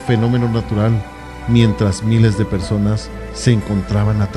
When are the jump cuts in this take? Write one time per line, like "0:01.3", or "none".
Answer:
none

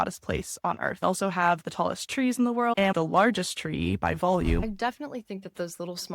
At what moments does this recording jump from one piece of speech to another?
0:01.0
0:02.7
0:04.6

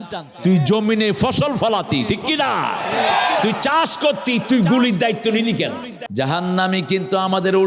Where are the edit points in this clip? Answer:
0:06.0

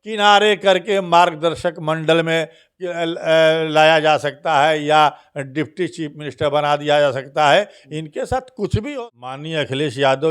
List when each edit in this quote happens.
0:08.9

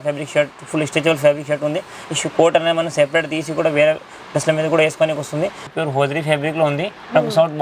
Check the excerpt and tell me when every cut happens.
0:05.7

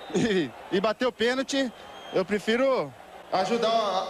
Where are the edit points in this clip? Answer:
none

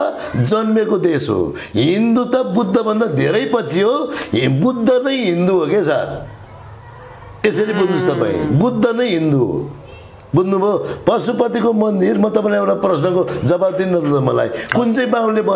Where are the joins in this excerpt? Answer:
none

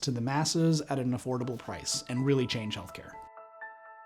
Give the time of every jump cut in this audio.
0:03.1

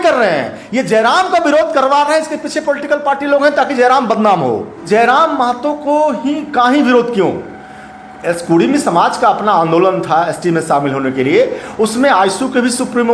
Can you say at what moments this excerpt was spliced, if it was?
0:04.8

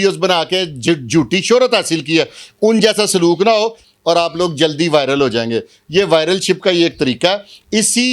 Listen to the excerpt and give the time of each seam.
0:03.8

